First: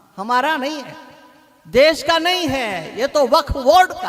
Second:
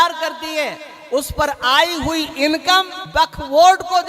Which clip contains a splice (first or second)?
second